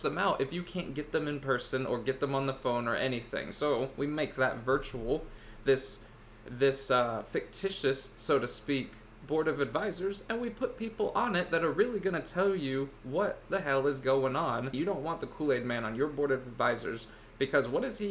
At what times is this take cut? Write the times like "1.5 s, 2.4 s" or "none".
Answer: 14.7 s